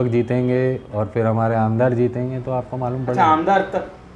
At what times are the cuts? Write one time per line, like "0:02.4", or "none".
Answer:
none